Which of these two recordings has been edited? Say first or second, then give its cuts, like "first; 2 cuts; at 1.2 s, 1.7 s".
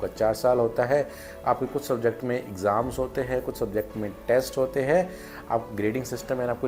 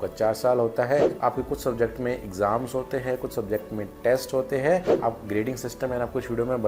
second; 2 cuts; at 1.1 s, 4.9 s